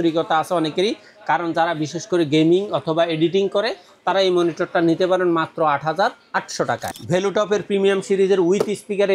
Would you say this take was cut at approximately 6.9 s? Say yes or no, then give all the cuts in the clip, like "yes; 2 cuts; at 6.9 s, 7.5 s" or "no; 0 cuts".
yes; 1 cut; at 6.9 s